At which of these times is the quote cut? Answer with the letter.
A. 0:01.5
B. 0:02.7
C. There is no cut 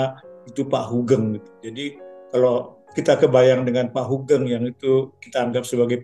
C